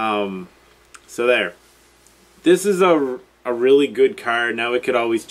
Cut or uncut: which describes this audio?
cut